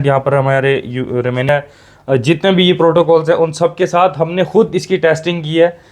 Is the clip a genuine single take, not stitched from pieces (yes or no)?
no